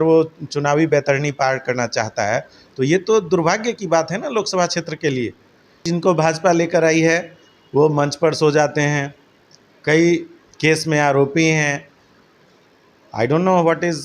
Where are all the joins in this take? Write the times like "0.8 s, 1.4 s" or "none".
5.8 s